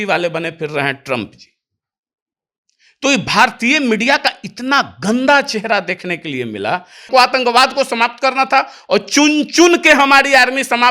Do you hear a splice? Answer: yes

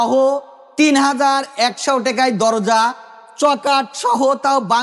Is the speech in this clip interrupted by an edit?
no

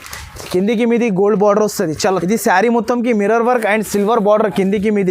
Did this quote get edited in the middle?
yes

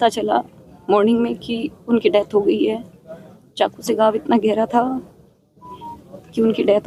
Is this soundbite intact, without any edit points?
yes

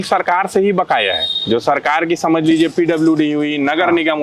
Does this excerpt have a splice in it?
no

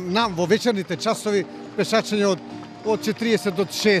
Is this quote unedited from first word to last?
yes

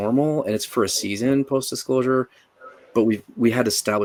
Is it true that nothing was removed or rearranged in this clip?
yes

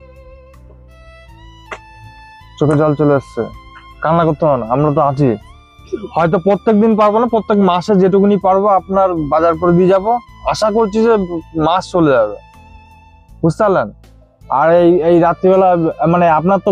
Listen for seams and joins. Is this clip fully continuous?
yes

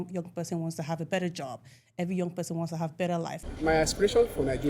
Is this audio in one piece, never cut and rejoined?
no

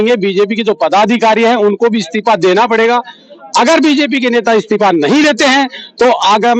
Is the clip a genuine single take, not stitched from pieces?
yes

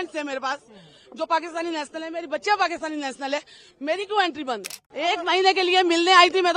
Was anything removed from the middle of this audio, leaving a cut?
yes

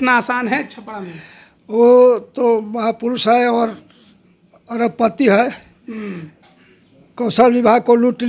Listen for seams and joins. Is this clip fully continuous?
yes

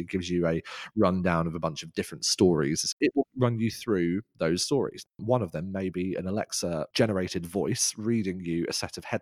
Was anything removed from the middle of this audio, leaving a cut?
yes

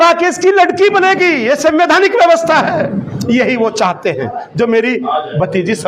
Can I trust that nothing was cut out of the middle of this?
yes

